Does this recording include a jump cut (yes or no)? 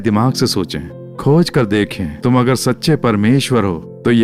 no